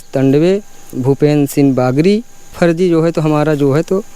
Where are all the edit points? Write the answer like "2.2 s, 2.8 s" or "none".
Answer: 0.9 s, 2.5 s